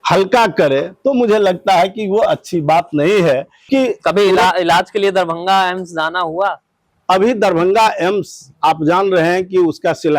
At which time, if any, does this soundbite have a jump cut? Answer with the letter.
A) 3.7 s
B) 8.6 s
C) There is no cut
A